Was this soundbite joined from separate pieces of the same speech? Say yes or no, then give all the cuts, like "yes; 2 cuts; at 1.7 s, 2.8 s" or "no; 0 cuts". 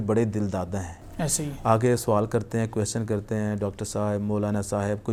no; 0 cuts